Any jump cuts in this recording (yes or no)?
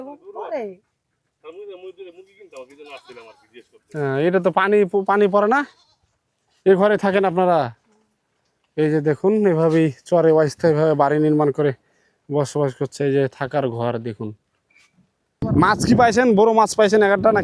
yes